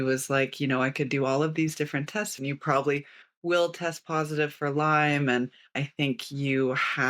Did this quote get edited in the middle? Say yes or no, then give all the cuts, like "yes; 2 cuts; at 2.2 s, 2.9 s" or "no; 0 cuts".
yes; 2 cuts; at 2.3 s, 5.8 s